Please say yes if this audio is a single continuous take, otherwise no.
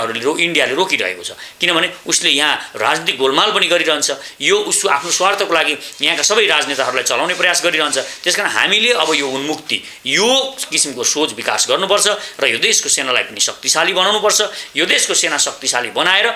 yes